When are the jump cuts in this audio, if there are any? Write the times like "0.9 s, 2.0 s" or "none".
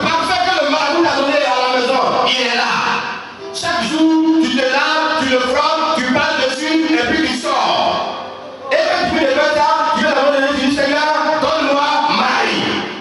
none